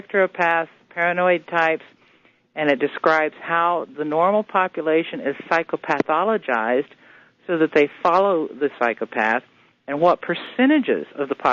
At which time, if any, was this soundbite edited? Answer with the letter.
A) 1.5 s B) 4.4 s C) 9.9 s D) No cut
B